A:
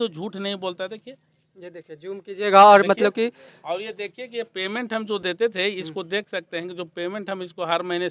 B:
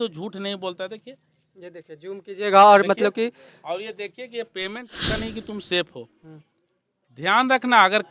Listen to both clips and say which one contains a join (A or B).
B